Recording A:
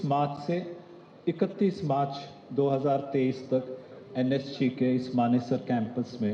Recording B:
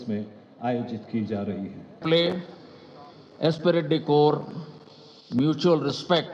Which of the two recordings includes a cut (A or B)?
B